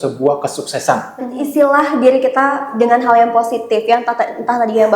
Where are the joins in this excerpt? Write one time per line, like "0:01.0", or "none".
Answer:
0:01.4